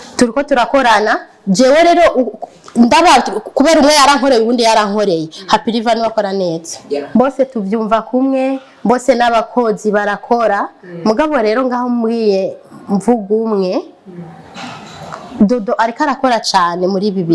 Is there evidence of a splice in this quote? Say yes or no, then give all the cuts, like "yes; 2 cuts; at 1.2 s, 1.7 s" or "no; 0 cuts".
yes; 1 cut; at 7.1 s